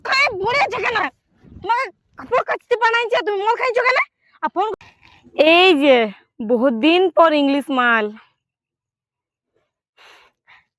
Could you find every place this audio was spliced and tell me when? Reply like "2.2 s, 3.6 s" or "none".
4.7 s